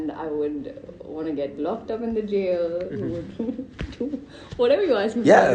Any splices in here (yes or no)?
no